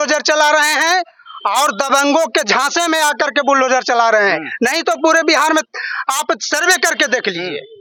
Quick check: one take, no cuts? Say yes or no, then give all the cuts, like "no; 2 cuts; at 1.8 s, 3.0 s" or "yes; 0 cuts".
yes; 0 cuts